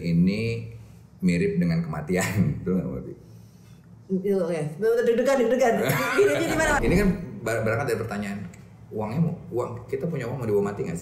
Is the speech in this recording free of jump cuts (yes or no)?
no